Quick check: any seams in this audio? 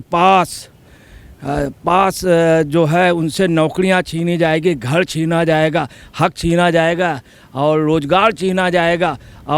no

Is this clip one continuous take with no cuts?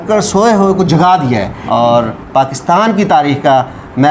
no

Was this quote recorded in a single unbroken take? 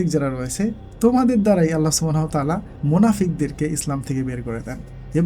no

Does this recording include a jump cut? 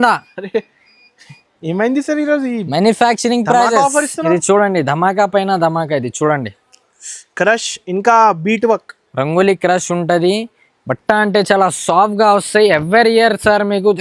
no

